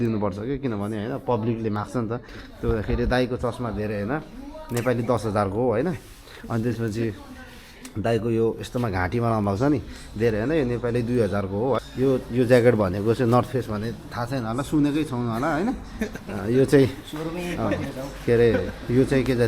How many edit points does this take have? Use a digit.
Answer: 1